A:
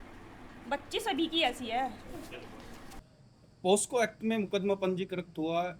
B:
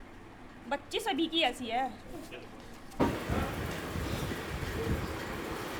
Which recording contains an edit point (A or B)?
A